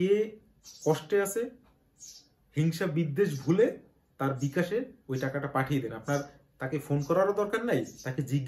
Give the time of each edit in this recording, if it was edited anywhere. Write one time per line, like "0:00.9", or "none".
none